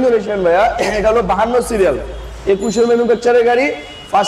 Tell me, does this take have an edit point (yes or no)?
no